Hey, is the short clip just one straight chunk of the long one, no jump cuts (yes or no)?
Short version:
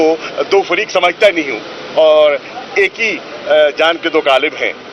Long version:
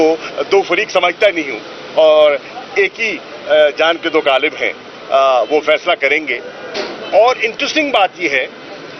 yes